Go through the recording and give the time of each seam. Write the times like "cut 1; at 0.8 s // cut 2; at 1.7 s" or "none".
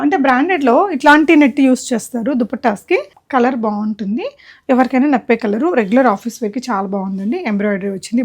cut 1; at 3.2 s

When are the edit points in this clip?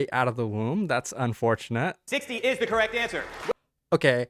cut 1; at 2.0 s // cut 2; at 3.3 s

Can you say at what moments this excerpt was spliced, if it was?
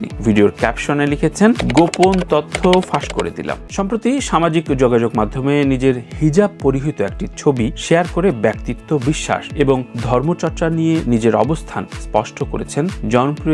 cut 1; at 3.6 s

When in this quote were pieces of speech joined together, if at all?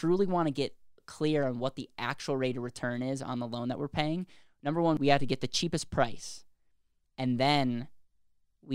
cut 1; at 5.0 s

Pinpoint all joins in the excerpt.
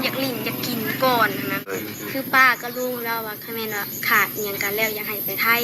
cut 1; at 1.7 s

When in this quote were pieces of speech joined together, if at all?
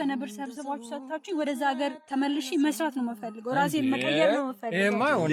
none

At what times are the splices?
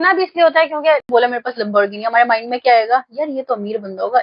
cut 1; at 1.0 s

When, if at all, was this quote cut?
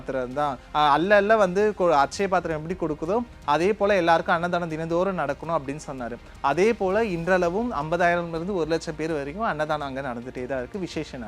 none

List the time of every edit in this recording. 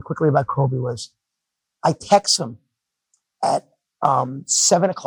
none

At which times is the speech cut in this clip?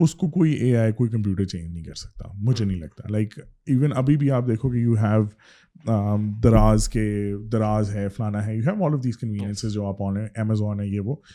none

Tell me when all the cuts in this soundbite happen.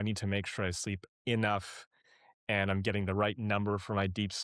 none

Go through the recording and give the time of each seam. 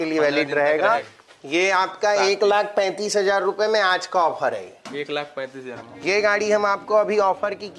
cut 1; at 1.2 s // cut 2; at 5.8 s

